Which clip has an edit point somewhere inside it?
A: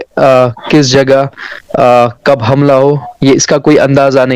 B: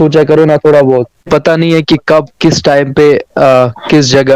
B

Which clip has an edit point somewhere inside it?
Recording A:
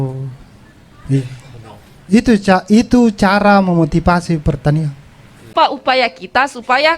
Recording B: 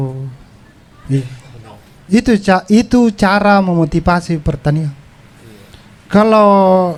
A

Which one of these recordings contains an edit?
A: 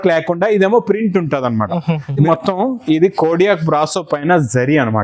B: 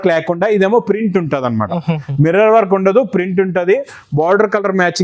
A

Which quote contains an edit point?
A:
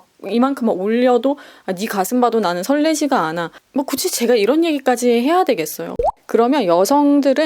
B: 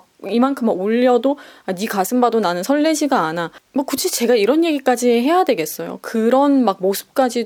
A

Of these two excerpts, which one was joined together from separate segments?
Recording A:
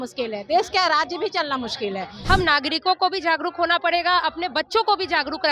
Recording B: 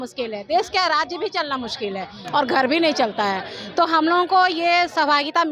A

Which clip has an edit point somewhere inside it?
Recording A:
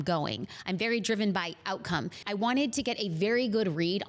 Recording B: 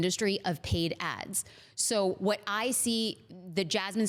A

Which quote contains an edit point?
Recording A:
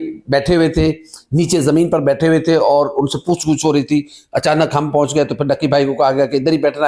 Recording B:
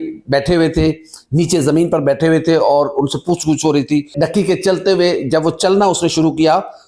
B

